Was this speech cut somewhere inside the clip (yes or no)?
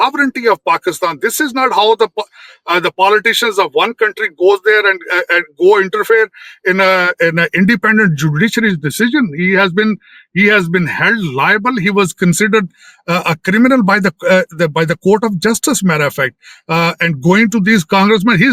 no